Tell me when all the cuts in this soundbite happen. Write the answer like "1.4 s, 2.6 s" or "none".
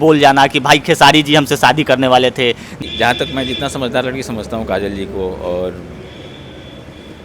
2.8 s

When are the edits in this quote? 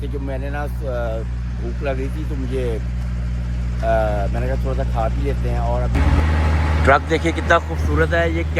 6.1 s

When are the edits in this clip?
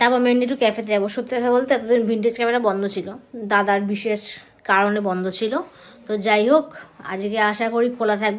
none

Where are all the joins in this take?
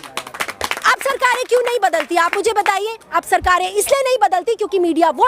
none

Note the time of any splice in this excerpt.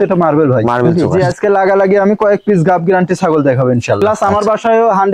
0.9 s, 4.0 s

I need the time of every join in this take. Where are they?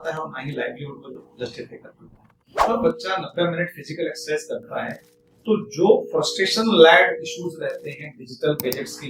2.6 s

